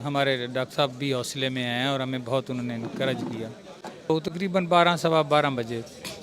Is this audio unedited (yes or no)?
no